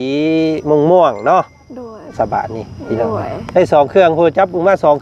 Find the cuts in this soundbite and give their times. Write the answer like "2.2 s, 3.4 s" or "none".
2.1 s